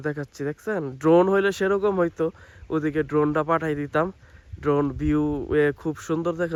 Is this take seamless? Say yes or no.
yes